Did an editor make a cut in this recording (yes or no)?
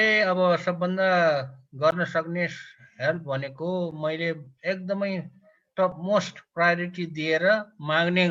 no